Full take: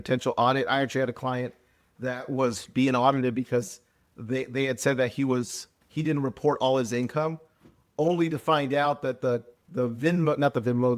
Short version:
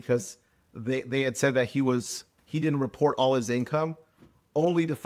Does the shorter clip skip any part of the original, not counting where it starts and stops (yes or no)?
no